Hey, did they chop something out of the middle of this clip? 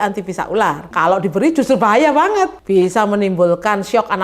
yes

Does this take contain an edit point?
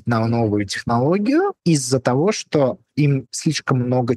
yes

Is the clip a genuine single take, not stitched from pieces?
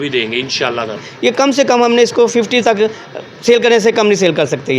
no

